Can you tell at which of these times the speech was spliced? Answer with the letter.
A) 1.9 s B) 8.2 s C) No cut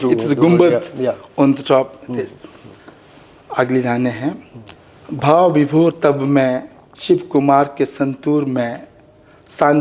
C